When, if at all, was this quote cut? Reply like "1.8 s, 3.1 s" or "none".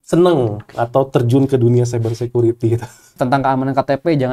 3.2 s

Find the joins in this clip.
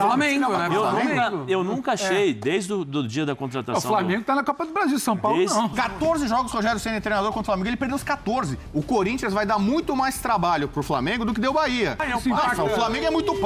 5.7 s, 8.6 s, 12.1 s

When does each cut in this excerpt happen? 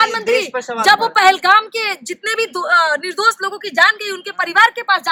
none

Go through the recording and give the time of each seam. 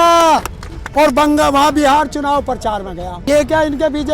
3.2 s

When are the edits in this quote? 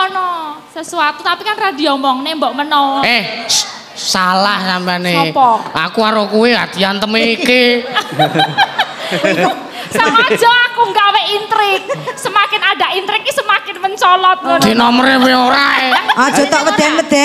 16.2 s

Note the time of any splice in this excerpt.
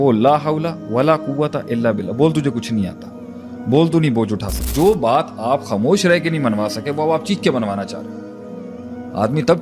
4.6 s

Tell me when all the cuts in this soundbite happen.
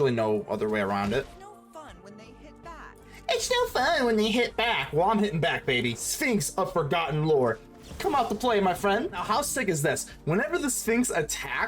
1.3 s, 6.1 s, 9.2 s

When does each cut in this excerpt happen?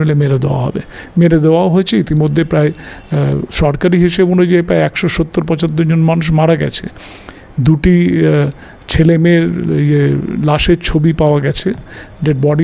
none

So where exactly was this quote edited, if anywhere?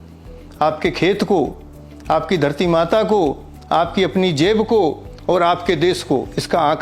none

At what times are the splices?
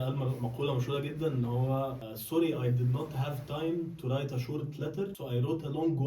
2.1 s, 5.2 s

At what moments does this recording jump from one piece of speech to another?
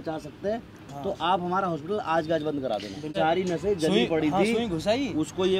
3.1 s

